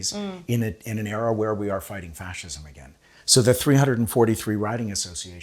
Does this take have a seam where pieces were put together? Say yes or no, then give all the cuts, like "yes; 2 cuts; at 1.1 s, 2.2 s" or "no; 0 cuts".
no; 0 cuts